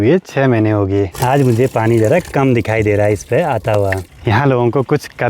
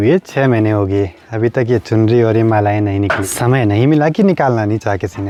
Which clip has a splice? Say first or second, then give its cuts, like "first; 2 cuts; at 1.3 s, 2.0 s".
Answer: first; 2 cuts; at 1.2 s, 4.1 s